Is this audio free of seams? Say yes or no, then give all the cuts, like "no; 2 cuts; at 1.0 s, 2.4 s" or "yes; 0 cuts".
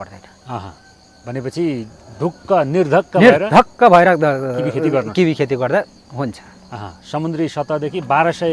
yes; 0 cuts